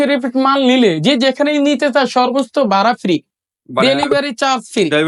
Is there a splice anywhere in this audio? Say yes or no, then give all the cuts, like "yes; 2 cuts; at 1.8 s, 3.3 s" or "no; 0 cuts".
no; 0 cuts